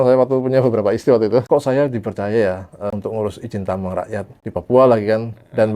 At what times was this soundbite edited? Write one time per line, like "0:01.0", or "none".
0:01.4
0:02.9
0:04.4